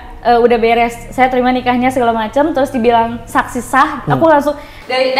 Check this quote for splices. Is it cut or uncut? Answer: uncut